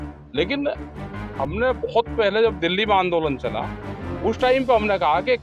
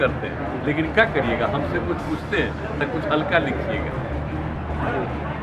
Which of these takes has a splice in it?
second; 1 cut; at 4.5 s

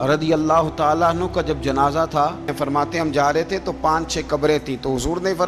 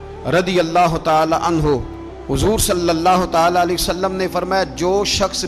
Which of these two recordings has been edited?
first; 1 cut; at 2.5 s

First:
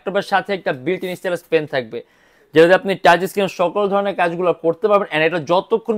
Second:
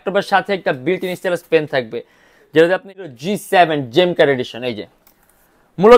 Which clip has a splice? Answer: second; 1 cut; at 3.0 s

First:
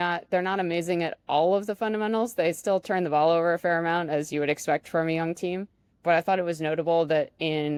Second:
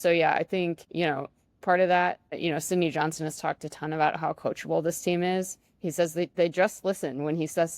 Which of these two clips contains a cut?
second; 2 cuts; at 0.8 s, 2.4 s

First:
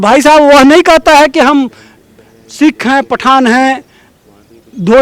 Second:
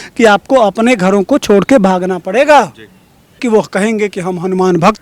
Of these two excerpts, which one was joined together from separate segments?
second; 1 cut; at 3.4 s

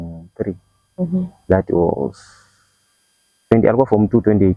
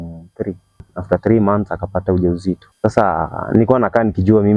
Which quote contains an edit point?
second; 2 cuts; at 0.9 s, 2.7 s

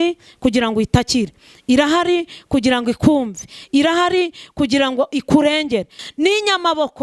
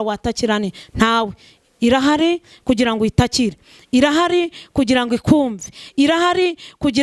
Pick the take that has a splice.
first; 1 cut; at 6.0 s

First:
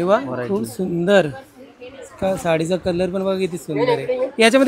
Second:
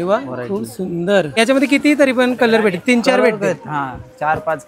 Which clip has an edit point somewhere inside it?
second; 1 cut; at 1.4 s

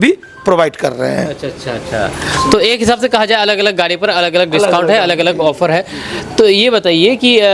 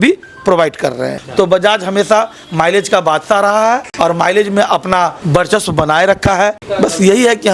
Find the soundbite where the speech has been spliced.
second; 4 cuts; at 1.1 s, 3.9 s, 5.2 s, 6.6 s

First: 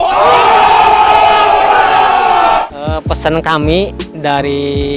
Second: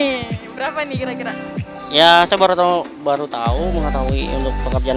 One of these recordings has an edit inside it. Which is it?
first; 1 cut; at 2.7 s

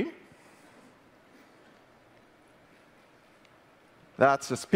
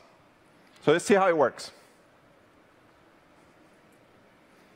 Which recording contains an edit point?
first; 1 cut; at 1.5 s

